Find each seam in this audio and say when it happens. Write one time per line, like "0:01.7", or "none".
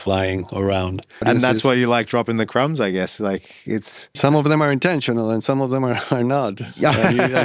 0:01.2
0:04.0

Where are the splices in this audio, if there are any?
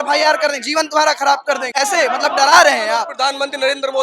0:01.7
0:03.1

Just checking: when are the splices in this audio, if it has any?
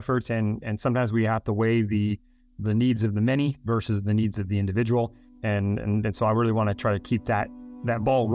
none

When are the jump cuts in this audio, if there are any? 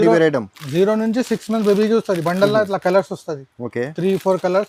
none

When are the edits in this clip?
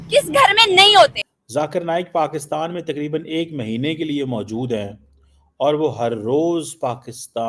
0:01.4

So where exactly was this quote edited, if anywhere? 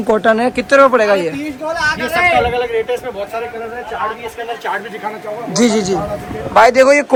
none

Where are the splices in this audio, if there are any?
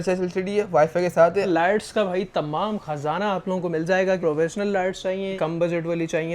0:01.5
0:05.3

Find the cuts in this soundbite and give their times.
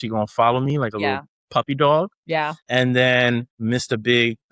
0:02.3
0:03.5

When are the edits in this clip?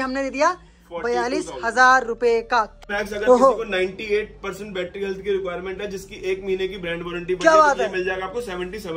0:02.8

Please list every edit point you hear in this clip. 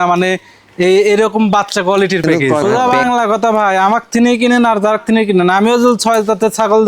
0:02.4

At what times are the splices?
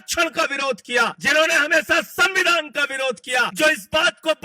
0:01.2
0:03.5

